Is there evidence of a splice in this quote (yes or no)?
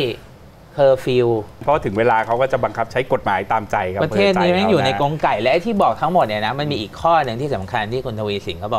yes